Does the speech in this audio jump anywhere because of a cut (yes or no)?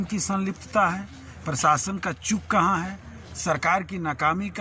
no